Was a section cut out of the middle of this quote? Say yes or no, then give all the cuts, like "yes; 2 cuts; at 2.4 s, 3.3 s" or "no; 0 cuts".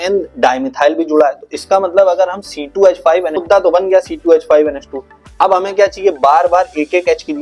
yes; 1 cut; at 3.4 s